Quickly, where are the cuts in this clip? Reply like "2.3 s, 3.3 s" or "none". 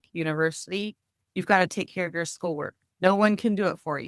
2.8 s